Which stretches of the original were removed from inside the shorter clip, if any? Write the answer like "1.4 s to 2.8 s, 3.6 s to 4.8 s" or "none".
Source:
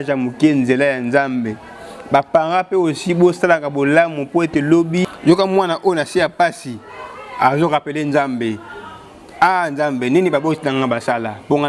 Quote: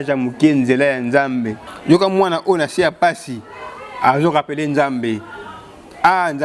1.8 s to 5.1 s